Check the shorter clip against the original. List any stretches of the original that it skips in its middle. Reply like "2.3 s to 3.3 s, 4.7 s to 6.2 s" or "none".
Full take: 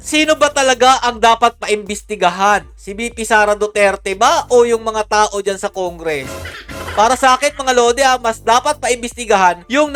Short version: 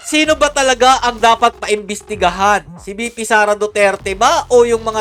none